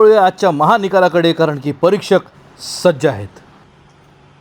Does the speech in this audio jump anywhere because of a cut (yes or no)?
yes